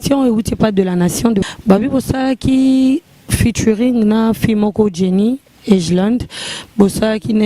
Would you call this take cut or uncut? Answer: cut